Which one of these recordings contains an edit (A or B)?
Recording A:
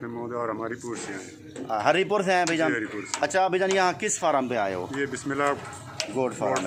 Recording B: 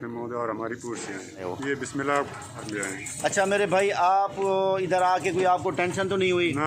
B